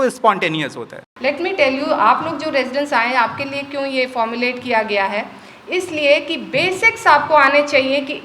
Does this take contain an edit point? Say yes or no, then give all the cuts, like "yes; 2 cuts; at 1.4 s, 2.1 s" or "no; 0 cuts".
yes; 1 cut; at 1.1 s